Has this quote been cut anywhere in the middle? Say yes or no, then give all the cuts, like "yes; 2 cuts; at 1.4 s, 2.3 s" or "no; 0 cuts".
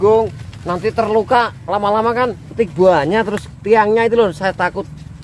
yes; 1 cut; at 2.5 s